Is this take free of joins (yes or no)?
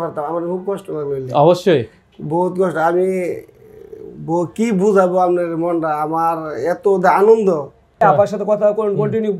no